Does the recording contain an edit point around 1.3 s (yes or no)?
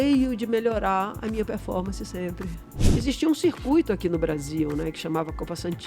no